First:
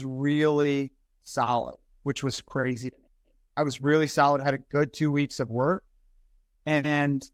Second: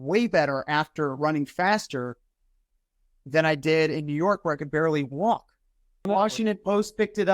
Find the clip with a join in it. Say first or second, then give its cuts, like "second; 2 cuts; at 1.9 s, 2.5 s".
second; 1 cut; at 6.0 s